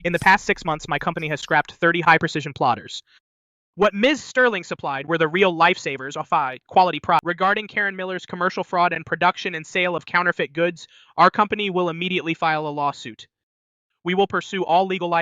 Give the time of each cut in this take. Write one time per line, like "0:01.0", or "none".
0:07.2